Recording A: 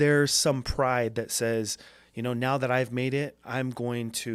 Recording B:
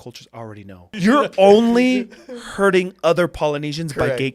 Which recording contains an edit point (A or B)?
B